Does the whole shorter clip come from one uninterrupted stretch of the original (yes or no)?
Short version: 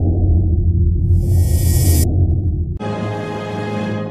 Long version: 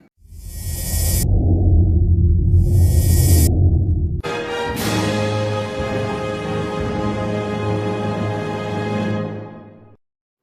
no